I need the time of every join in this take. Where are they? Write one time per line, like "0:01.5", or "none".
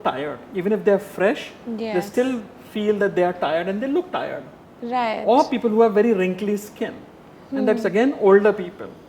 none